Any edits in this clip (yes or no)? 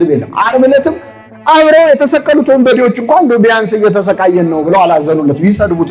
no